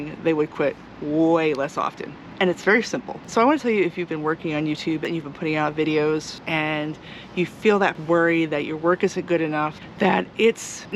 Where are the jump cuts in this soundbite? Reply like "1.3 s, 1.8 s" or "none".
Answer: 3.2 s, 5.0 s, 6.4 s, 8.0 s, 9.8 s